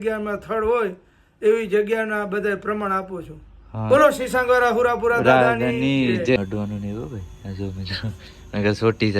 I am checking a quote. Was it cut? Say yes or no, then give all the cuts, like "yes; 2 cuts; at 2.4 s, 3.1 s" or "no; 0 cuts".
yes; 1 cut; at 6.4 s